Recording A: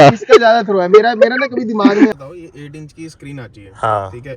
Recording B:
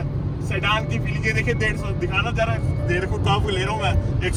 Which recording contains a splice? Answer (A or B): A